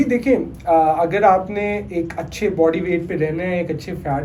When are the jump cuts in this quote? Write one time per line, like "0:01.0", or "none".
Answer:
none